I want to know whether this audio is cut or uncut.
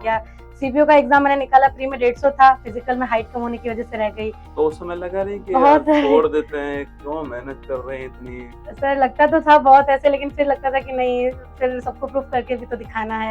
uncut